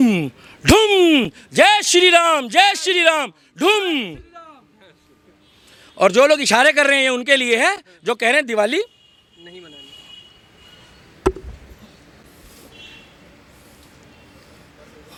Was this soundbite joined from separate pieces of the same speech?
no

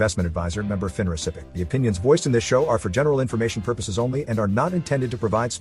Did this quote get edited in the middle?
yes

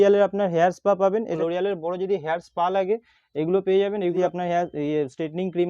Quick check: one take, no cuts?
no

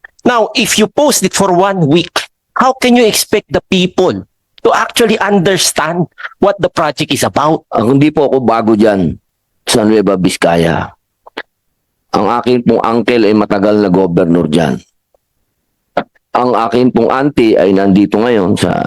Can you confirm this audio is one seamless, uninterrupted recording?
no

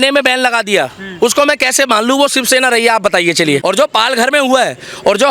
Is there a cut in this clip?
yes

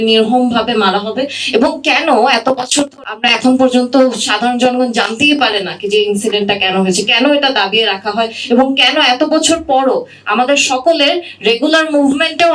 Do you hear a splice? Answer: yes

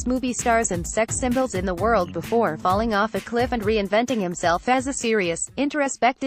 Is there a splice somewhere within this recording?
no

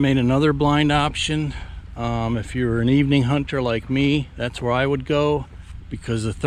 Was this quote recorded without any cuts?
yes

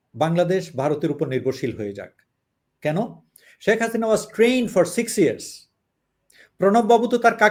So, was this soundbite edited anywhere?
no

